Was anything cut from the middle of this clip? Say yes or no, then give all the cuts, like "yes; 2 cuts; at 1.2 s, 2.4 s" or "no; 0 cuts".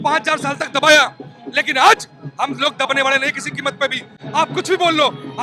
no; 0 cuts